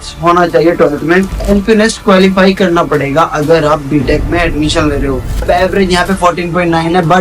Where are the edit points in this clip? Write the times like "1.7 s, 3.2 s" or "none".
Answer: 1.4 s, 5.4 s